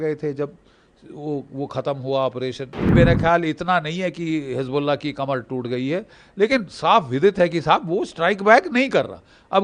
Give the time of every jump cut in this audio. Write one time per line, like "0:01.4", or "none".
0:02.9